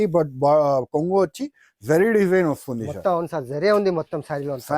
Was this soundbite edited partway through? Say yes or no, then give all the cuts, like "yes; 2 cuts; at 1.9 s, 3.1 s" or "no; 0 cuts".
no; 0 cuts